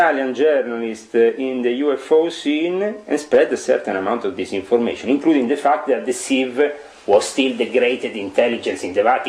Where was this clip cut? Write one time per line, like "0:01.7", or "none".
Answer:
none